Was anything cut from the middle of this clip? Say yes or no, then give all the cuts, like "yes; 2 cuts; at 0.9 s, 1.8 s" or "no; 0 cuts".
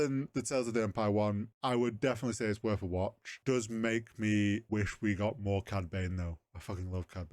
yes; 3 cuts; at 1.5 s, 3.3 s, 4.6 s